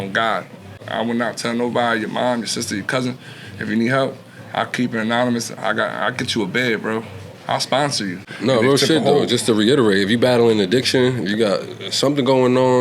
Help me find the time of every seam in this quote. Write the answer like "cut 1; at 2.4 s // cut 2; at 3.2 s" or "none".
cut 1; at 0.8 s // cut 2; at 8.3 s